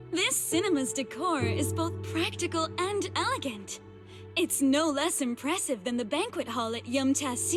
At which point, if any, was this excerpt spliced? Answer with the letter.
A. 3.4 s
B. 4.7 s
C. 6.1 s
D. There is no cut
D